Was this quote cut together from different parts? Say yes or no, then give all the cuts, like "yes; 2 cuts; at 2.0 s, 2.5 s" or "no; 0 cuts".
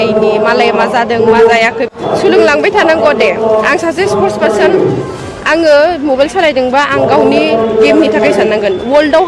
yes; 1 cut; at 1.9 s